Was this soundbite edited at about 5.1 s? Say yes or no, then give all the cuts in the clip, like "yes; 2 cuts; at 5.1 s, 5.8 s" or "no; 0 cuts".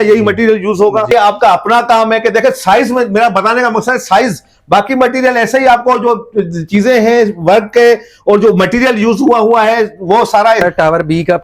no; 2 cuts; at 1.1 s, 10.6 s